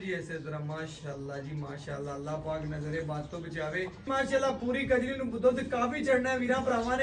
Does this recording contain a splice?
yes; 1 cut; at 4.1 s

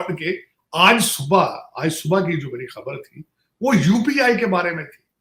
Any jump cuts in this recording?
no; 0 cuts

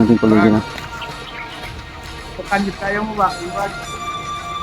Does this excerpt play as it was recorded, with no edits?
no; 3 cuts; at 1.1 s, 2.4 s, 3.7 s

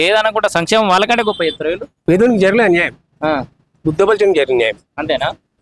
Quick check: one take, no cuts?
no; 1 cut; at 1.9 s

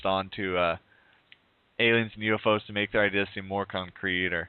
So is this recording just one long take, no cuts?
no; 1 cut; at 2.7 s

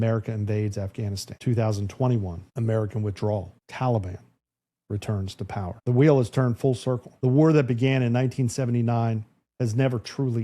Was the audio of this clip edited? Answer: yes; 5 cuts; at 1.3 s, 2.4 s, 3.6 s, 5.8 s, 7.1 s

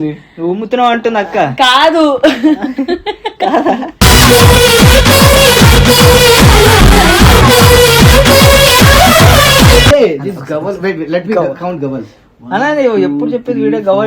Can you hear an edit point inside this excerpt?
yes; 1 cut; at 9.9 s

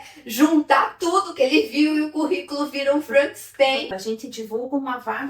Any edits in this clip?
yes; 1 cut; at 3.8 s

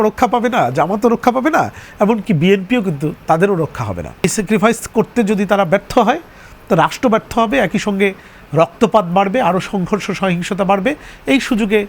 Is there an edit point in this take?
yes; 1 cut; at 4.2 s

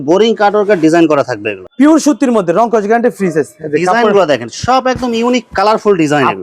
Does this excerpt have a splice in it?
yes; 1 cut; at 1.6 s

